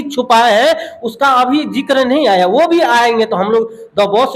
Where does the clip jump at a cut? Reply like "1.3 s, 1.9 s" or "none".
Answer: none